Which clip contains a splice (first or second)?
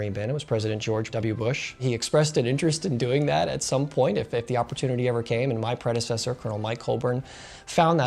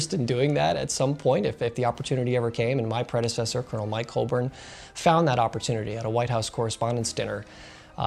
first